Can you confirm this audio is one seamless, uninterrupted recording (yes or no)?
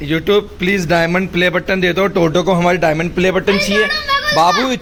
yes